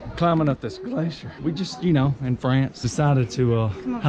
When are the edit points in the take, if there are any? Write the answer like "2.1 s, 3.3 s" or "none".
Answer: 1.3 s, 2.8 s

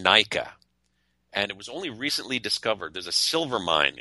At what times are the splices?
none

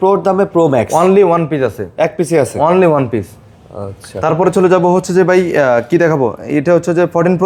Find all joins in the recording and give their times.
none

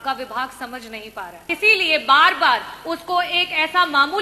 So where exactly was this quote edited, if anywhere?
1.4 s

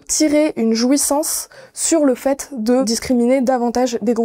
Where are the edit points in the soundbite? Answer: 2.9 s

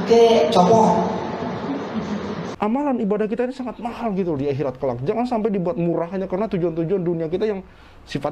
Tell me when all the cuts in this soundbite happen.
2.5 s

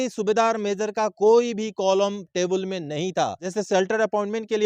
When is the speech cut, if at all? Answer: 3.4 s

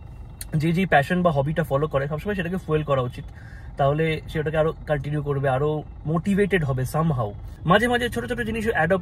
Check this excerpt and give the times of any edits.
7.5 s

